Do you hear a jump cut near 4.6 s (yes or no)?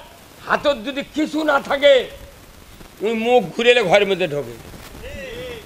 no